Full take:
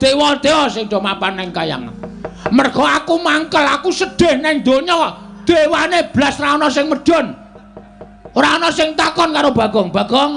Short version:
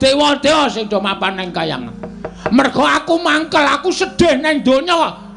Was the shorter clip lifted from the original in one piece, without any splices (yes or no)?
yes